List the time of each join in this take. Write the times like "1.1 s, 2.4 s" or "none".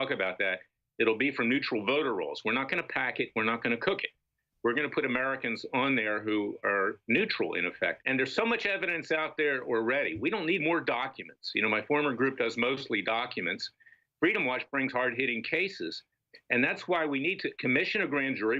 8.0 s